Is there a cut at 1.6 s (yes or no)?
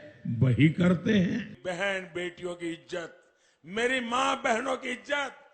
yes